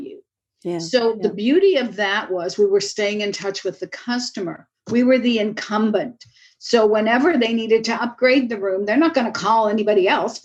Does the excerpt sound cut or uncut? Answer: uncut